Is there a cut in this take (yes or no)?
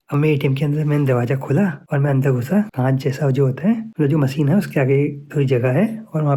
no